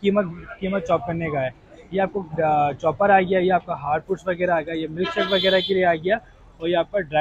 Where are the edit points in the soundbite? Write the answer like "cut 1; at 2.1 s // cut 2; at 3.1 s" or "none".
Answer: none